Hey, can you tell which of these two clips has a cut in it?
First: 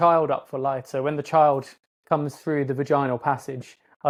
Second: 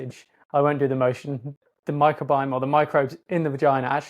second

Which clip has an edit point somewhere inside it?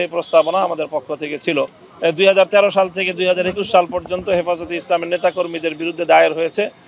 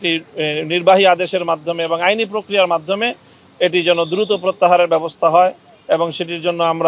first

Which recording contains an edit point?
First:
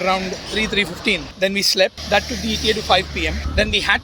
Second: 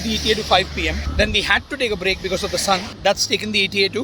first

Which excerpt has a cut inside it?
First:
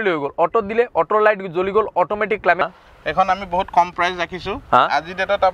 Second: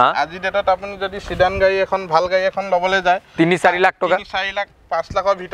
first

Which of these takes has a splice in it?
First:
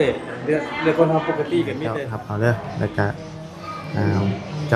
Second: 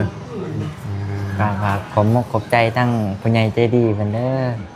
first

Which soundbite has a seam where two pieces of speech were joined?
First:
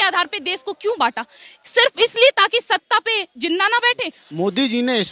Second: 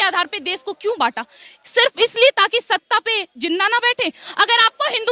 first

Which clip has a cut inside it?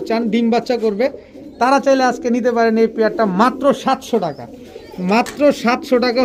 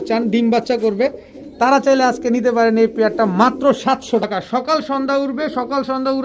second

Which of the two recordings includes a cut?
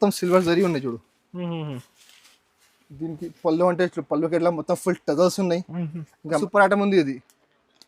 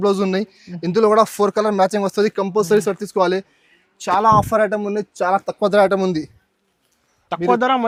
first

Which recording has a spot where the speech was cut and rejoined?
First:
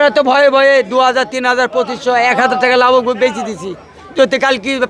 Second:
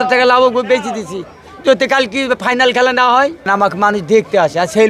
second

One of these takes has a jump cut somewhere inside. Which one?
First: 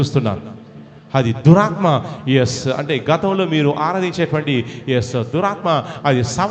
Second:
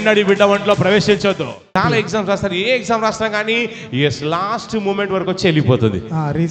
second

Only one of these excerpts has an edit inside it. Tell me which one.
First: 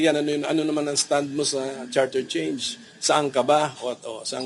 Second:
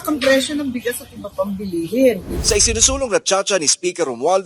second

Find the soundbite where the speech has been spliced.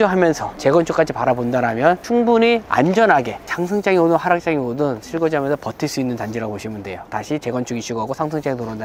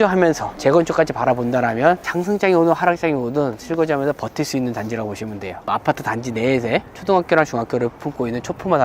second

